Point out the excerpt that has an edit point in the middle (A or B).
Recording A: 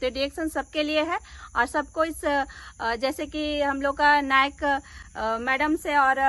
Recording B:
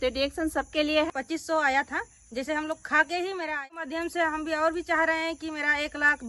B